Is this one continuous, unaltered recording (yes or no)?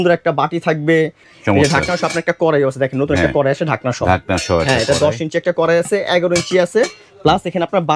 no